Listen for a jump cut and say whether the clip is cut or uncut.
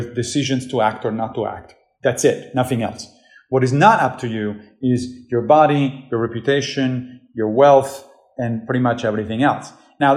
uncut